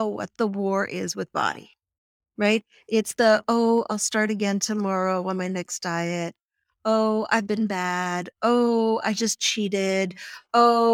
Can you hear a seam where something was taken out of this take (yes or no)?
no